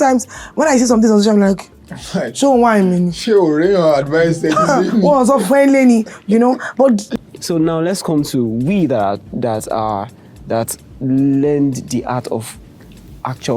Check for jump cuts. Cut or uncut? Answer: cut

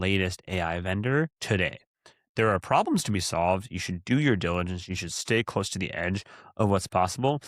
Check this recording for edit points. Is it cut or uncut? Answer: cut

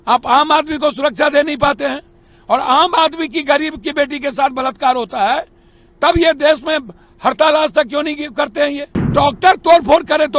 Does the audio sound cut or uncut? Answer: cut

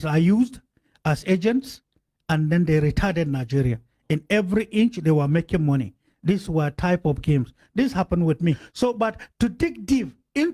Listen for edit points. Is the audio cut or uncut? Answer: cut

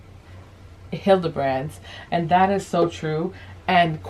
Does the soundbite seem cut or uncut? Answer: uncut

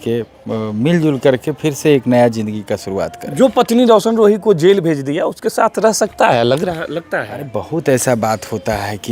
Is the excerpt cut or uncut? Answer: uncut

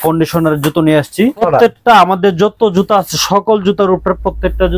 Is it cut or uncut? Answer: cut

